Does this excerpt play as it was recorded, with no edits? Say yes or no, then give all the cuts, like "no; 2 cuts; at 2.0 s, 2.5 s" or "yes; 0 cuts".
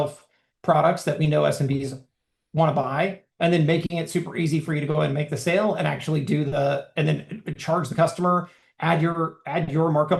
yes; 0 cuts